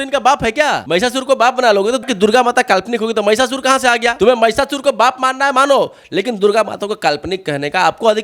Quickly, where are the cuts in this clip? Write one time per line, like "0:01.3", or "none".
0:00.8
0:02.1
0:04.1